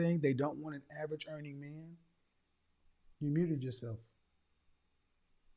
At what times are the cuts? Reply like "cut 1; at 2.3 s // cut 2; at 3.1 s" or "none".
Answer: none